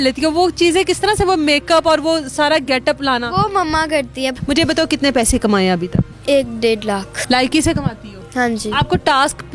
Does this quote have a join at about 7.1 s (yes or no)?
yes